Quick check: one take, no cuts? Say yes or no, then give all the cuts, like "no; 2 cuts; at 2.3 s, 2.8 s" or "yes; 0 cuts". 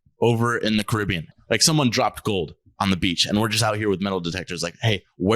no; 1 cut; at 1.3 s